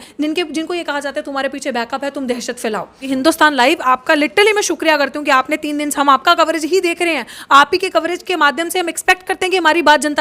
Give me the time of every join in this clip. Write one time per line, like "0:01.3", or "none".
0:03.0